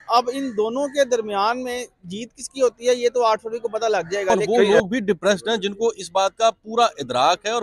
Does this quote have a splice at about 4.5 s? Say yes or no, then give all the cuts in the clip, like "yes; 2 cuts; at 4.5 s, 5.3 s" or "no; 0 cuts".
yes; 1 cut; at 4.5 s